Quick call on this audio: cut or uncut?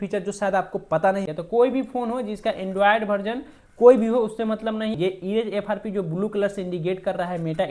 cut